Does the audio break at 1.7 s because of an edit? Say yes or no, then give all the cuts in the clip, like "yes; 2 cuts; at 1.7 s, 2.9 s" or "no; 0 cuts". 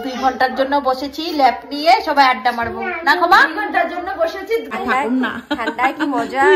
no; 1 cut; at 4.8 s